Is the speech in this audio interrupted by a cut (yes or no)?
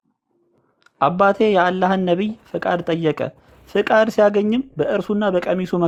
no